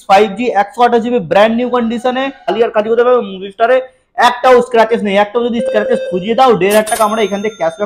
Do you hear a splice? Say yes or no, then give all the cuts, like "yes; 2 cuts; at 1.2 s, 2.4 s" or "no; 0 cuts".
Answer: yes; 1 cut; at 2.5 s